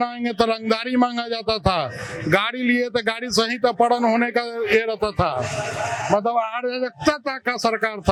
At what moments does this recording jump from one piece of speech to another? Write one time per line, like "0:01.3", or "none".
none